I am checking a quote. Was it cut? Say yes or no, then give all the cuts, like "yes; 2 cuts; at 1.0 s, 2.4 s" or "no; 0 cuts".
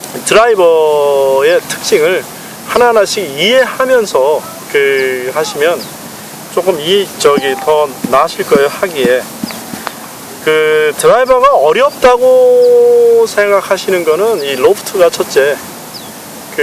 yes; 1 cut; at 14.6 s